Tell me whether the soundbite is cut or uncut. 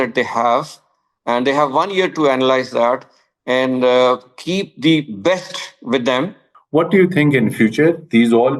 cut